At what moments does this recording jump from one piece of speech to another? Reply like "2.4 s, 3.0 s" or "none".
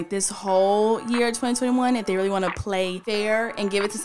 3.0 s